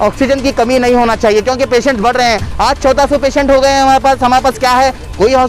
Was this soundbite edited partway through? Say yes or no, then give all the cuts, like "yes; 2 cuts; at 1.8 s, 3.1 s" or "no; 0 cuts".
no; 0 cuts